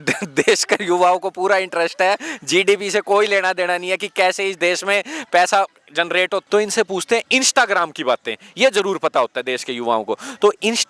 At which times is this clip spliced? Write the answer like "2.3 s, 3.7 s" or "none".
6.4 s